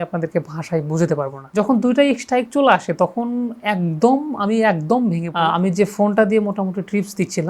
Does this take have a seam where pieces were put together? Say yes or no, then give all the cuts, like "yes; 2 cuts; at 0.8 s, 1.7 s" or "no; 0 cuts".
yes; 2 cuts; at 1.4 s, 5.3 s